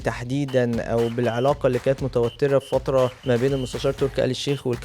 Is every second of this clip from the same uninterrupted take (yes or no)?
no